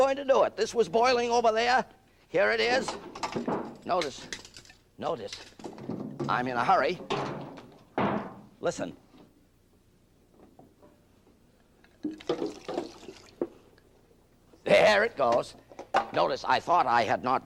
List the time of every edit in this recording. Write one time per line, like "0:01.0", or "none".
none